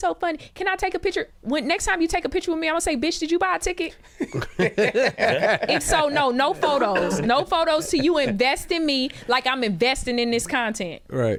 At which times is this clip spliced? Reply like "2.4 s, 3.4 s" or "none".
none